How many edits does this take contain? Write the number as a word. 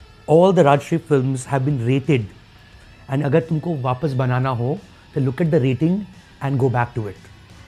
zero